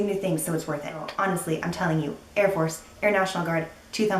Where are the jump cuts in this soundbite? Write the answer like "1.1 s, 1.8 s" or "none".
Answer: 1.1 s